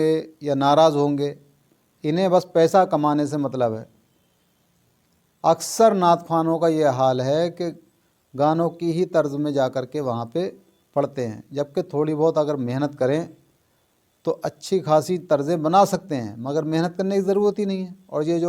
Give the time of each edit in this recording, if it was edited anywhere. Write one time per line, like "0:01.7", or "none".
none